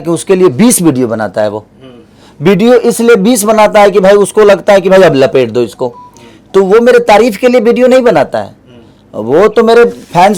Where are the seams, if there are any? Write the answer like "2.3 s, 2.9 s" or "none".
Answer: none